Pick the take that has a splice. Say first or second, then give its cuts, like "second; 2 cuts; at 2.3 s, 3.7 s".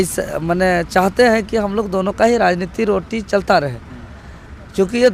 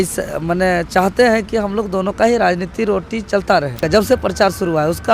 second; 1 cut; at 3.8 s